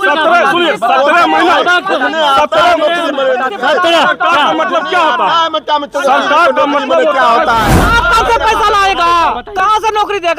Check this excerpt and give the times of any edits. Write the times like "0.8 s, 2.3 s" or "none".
7.8 s